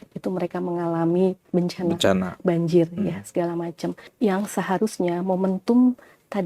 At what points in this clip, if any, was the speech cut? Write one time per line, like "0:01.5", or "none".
0:01.4
0:04.0